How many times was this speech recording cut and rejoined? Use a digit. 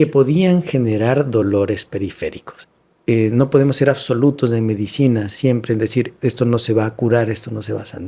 1